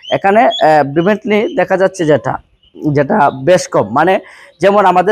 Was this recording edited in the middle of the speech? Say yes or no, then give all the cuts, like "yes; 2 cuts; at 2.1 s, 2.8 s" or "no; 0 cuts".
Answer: no; 0 cuts